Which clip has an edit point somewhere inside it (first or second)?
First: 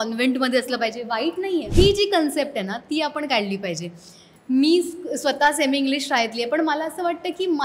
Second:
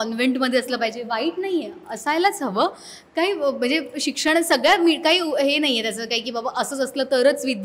first